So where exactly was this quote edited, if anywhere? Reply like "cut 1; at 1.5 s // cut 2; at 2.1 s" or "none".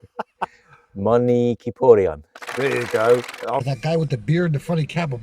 cut 1; at 3.7 s